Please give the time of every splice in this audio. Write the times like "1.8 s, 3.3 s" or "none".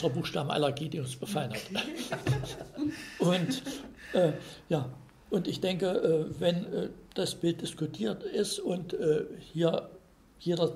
none